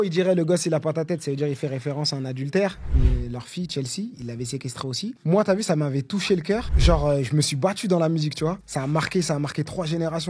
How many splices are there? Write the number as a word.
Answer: two